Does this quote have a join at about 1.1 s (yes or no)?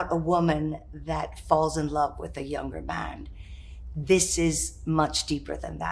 no